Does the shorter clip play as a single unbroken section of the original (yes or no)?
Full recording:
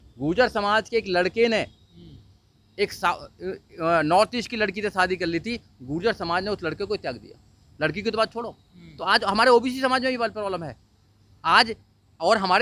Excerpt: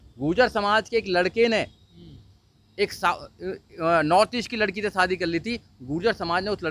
yes